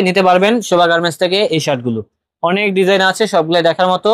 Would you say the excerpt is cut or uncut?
uncut